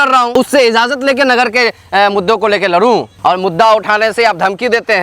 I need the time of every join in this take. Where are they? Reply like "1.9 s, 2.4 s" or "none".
3.1 s